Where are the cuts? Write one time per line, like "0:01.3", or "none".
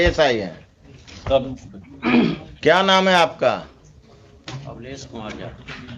0:02.5